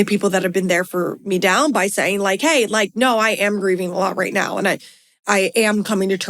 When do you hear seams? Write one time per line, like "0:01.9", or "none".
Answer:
0:05.2